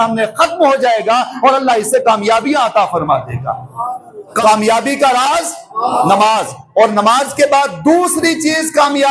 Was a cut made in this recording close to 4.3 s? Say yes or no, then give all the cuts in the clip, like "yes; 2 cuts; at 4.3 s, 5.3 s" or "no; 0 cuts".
yes; 1 cut; at 4.3 s